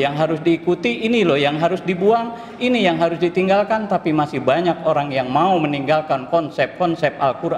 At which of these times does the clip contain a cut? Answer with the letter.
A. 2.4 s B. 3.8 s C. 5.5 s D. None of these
D